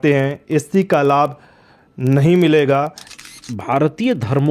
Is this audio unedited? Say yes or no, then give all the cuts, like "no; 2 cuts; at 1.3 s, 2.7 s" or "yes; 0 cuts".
no; 1 cut; at 3.0 s